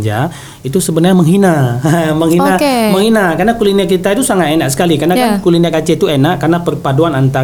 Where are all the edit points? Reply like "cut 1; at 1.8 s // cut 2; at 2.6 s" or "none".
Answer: none